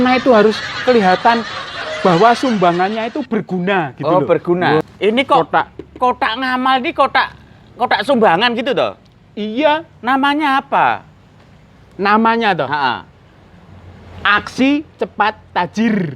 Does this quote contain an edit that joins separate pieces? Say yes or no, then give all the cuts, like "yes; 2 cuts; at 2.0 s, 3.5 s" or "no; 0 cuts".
yes; 1 cut; at 4.8 s